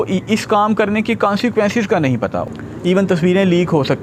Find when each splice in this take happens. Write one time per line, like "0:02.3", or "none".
0:02.4

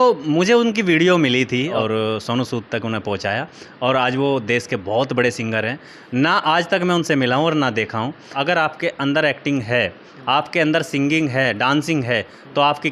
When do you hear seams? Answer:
0:01.8
0:08.3

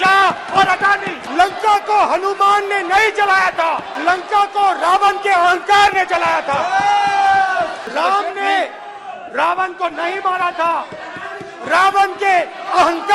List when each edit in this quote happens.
0:01.2
0:03.9
0:07.9

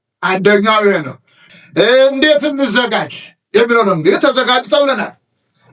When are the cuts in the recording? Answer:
0:01.4

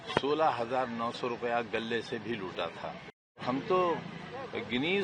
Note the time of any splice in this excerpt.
0:03.4

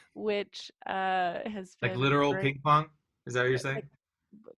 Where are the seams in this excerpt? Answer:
none

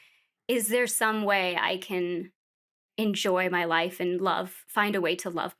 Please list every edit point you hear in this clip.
none

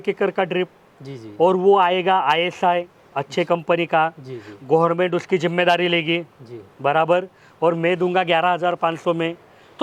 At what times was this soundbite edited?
none

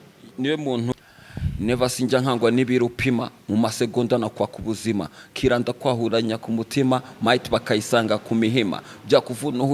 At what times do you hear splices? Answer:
0:00.9

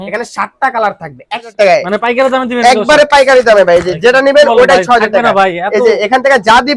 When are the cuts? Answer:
0:01.5

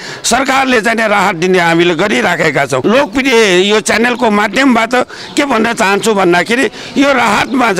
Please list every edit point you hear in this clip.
0:02.8

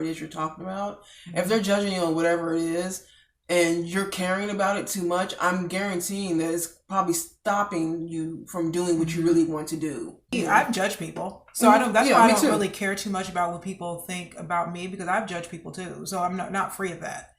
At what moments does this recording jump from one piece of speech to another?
0:10.3

